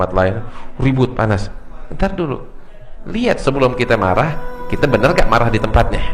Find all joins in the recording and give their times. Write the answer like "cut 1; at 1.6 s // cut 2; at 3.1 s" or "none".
cut 1; at 3.0 s